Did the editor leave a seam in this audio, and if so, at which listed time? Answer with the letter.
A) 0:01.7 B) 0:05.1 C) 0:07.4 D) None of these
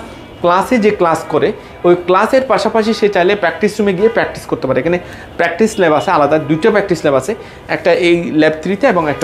D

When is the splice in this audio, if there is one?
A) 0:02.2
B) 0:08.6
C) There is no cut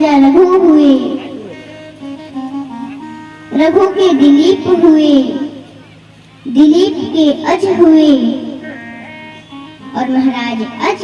C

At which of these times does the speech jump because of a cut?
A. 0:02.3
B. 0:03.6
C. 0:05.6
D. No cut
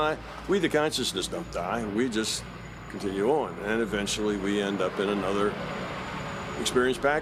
D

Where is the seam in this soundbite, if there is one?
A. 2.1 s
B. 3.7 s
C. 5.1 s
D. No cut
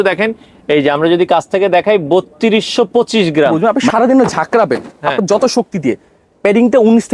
B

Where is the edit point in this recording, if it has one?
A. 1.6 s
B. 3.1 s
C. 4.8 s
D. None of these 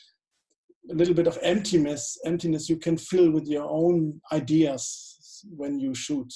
D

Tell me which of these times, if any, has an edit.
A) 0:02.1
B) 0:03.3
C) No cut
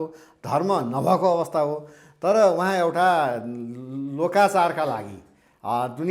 C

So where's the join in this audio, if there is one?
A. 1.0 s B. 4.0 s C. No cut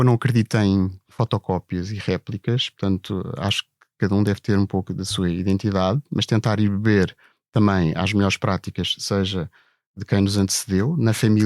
A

